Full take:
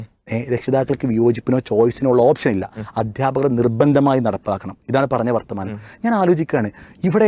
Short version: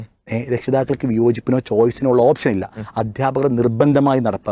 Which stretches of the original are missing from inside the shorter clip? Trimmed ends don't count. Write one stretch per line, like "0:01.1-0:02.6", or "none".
none